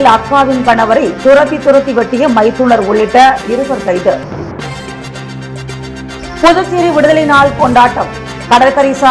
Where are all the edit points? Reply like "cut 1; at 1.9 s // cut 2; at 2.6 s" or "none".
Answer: none